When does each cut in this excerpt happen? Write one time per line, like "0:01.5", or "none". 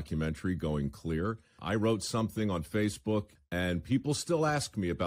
0:01.6
0:03.4